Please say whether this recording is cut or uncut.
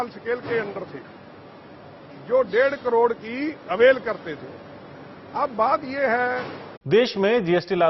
uncut